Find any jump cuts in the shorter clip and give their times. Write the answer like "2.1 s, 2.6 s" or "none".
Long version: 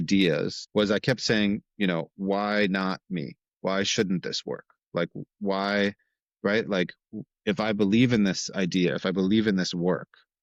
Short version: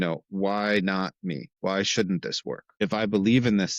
1.5 s, 2.7 s